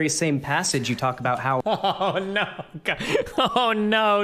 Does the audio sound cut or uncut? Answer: uncut